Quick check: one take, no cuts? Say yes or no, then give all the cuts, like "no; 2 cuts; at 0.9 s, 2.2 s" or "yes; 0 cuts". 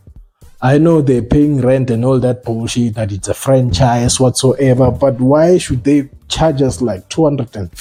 yes; 0 cuts